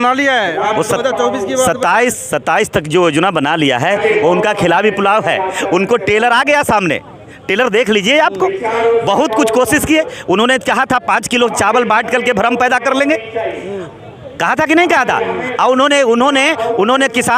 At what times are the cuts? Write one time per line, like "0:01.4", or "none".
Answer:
none